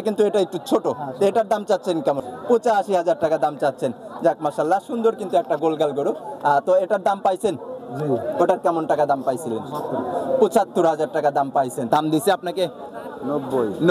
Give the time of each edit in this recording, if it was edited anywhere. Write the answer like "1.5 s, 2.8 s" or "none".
2.3 s, 11.8 s